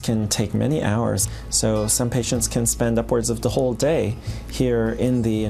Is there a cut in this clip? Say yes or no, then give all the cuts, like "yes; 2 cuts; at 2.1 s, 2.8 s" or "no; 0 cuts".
no; 0 cuts